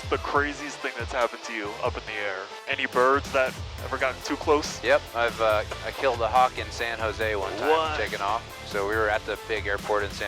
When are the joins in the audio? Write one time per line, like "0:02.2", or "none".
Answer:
none